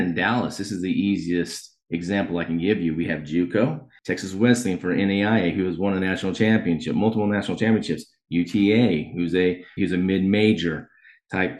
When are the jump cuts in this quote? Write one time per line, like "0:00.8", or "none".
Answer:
0:03.9
0:09.8